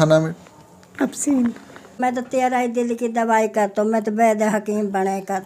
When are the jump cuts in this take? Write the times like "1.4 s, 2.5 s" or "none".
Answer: 2.0 s